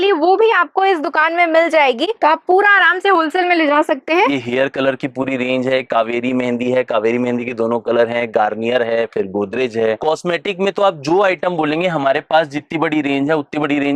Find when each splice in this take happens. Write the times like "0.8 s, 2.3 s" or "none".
none